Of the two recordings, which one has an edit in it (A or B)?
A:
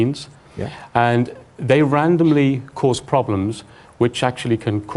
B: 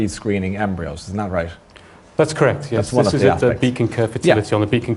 B